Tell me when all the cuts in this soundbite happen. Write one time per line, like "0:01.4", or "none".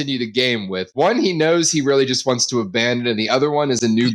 none